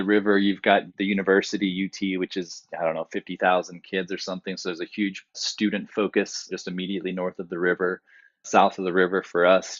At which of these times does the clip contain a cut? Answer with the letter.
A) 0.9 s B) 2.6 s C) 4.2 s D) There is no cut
A